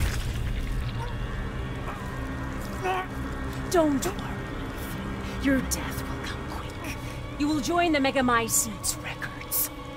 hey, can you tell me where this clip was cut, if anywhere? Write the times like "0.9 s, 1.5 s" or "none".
none